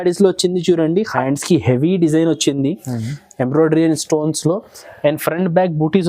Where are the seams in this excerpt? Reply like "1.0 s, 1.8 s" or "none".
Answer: 1.1 s